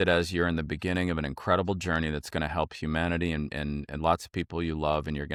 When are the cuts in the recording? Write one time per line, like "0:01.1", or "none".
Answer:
none